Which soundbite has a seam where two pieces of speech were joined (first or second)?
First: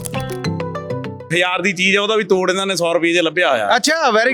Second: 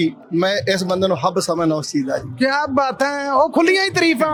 first